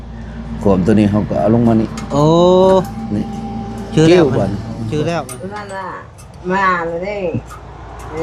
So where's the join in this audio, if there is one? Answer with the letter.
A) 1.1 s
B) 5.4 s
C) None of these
B